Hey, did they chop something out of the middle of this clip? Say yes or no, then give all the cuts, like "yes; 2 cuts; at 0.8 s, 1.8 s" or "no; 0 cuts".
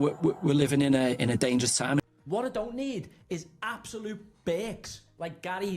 yes; 1 cut; at 2.0 s